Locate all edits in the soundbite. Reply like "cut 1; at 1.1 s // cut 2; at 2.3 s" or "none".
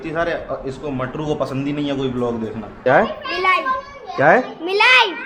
cut 1; at 2.8 s